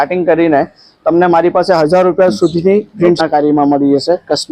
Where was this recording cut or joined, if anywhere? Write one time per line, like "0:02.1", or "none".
0:03.2